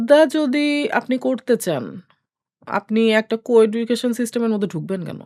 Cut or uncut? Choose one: uncut